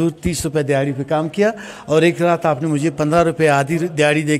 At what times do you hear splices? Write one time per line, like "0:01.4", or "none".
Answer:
none